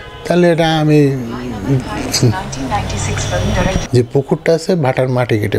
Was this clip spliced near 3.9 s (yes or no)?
yes